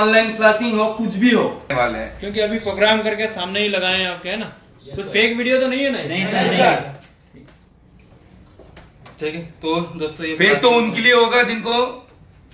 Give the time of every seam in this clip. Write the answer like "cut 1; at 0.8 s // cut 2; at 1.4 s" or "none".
cut 1; at 1.7 s